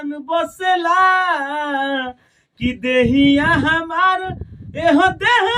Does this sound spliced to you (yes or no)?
no